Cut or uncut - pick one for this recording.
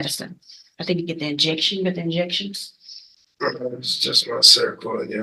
uncut